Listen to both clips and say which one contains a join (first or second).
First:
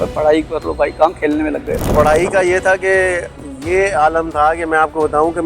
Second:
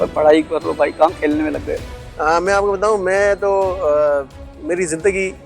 first